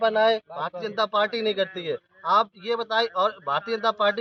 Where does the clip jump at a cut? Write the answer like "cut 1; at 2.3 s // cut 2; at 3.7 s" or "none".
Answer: none